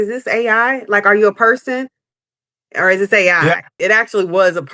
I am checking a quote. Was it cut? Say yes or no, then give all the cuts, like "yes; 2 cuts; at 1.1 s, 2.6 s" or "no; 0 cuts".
yes; 1 cut; at 3.8 s